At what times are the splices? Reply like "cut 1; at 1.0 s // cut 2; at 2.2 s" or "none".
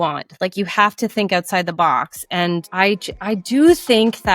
cut 1; at 2.7 s